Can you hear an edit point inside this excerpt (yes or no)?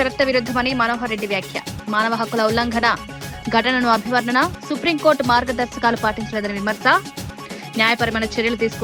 no